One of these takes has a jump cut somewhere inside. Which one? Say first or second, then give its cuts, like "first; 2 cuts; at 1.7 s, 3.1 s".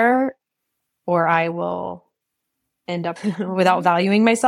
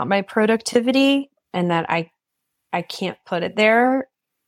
first; 1 cut; at 3.2 s